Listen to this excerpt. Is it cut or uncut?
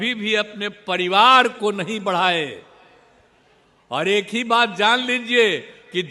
uncut